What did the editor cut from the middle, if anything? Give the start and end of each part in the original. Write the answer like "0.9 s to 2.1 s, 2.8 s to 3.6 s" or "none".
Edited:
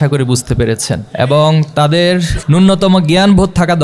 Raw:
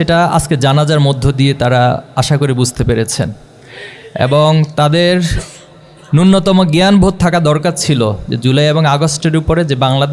3.4 s to 4.1 s, 5.4 s to 6.0 s